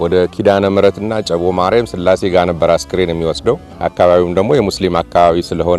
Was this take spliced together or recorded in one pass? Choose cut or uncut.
cut